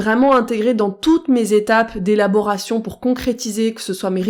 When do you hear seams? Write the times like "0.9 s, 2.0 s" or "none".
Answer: none